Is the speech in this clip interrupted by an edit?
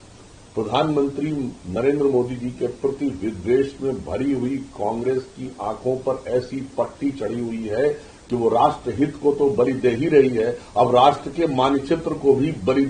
no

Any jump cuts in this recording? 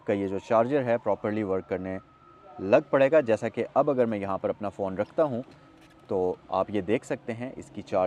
no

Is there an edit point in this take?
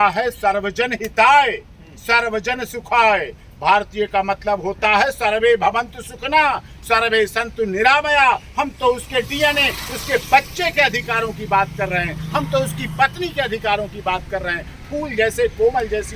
no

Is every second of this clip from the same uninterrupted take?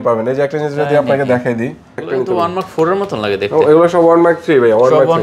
no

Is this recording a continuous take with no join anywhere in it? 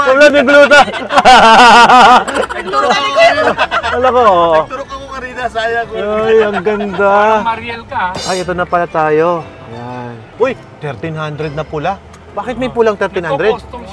yes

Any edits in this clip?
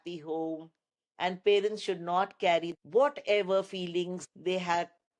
yes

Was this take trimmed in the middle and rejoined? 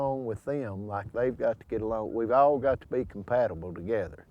no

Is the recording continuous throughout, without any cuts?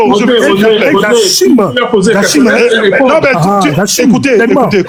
yes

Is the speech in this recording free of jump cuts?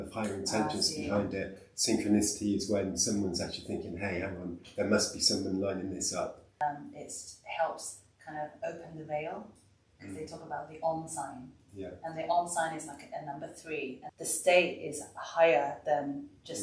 no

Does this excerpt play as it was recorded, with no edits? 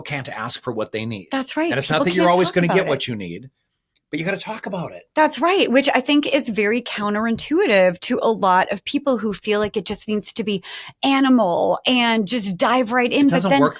yes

